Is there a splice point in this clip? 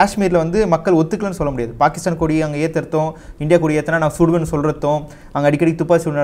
no; 0 cuts

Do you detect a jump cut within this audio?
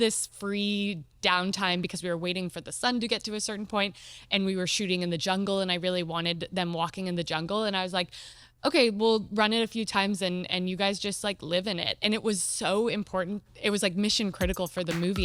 no; 0 cuts

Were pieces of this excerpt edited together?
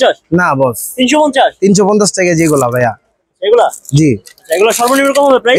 no; 0 cuts

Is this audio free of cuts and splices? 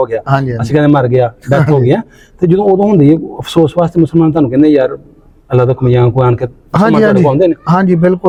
yes; 0 cuts

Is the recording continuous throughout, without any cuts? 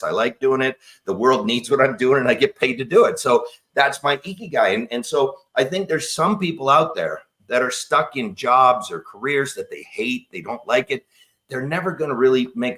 yes; 0 cuts

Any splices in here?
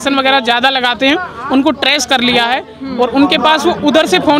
no; 0 cuts

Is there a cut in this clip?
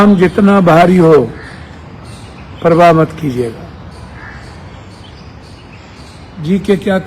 no; 0 cuts

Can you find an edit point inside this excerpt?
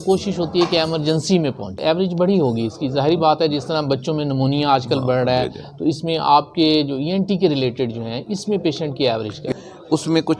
yes; 2 cuts; at 1.8 s, 9.5 s

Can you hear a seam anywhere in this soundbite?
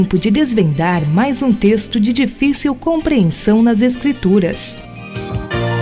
yes; 1 cut; at 4.7 s

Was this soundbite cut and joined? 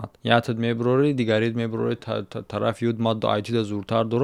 no; 0 cuts

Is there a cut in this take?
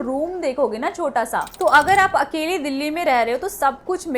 yes; 1 cut; at 1.5 s

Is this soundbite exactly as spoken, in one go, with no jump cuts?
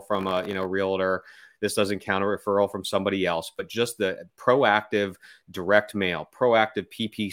yes; 0 cuts

